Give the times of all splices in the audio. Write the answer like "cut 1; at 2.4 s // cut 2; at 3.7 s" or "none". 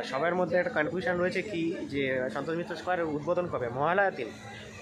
none